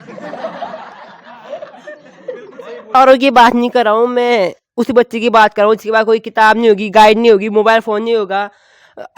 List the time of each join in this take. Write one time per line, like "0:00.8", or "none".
0:02.9